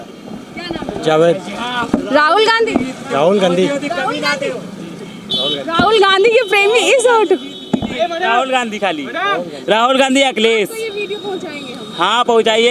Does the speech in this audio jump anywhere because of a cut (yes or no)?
no